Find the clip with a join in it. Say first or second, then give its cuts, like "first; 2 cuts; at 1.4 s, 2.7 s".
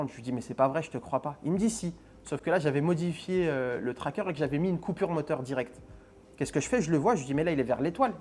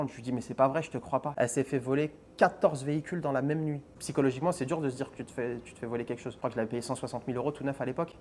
second; 3 cuts; at 1.3 s, 3.9 s, 6.4 s